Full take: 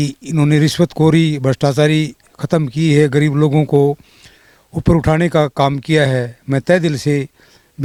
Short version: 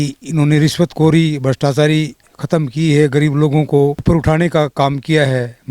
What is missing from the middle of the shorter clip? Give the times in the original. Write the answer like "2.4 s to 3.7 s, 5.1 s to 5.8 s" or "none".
4.0 s to 4.8 s